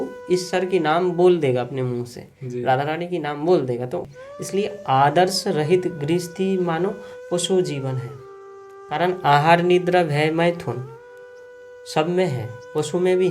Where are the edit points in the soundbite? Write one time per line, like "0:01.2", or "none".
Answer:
0:04.0

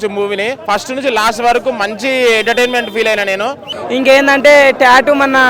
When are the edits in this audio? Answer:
0:03.7

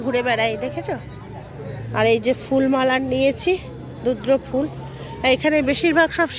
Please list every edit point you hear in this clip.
none

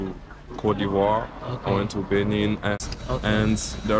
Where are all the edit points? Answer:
0:02.8

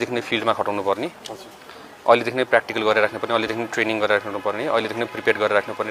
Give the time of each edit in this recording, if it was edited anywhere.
none

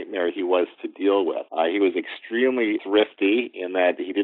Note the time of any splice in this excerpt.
0:01.4
0:02.8

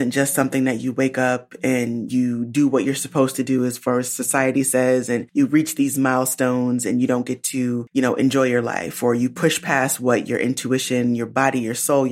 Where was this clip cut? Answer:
0:05.3
0:07.8

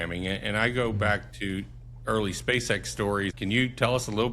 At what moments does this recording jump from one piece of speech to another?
0:03.4

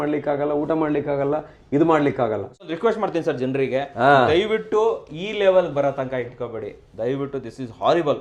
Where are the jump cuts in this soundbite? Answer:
0:02.6

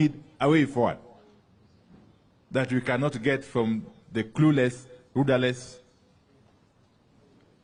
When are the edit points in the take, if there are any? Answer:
none

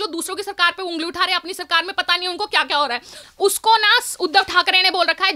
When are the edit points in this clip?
0:03.2

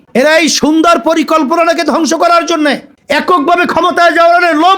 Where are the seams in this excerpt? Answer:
0:02.9

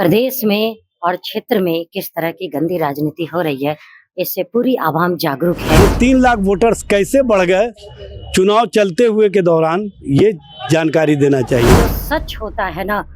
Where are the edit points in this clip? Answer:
0:05.8
0:11.8

